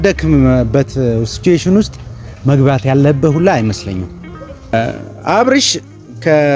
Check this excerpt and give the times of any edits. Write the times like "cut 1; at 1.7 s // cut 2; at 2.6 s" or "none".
cut 1; at 4.7 s